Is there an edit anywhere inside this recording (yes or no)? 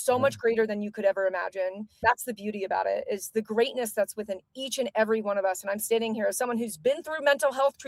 no